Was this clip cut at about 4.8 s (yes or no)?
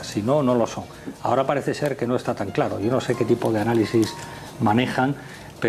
no